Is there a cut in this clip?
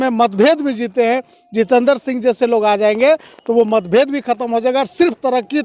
no; 0 cuts

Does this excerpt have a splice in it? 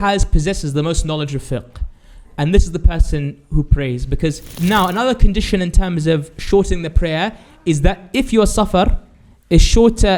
yes; 1 cut; at 4.5 s

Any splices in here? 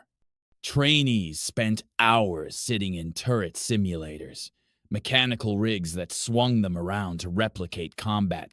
yes; 1 cut; at 7.3 s

